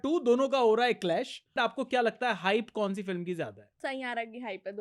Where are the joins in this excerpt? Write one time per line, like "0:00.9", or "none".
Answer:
0:01.5
0:03.6